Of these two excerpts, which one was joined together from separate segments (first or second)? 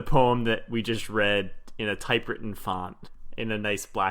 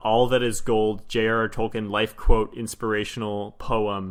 first